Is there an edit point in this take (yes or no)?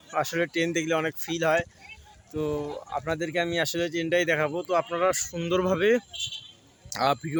no